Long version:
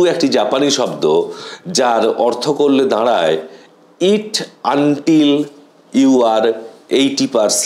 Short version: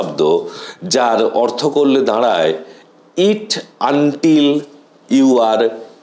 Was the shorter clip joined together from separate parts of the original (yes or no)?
no